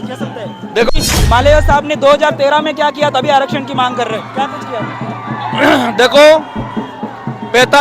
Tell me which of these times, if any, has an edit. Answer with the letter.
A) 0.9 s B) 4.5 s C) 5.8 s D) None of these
A